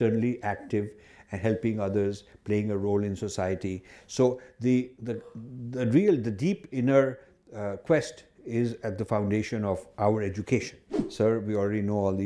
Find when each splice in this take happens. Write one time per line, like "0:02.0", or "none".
0:11.0